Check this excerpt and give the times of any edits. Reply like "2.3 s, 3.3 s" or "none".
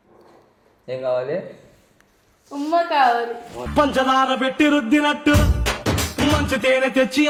none